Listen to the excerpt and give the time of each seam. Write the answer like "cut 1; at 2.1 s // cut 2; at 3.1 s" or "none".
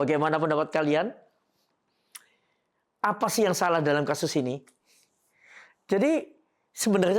none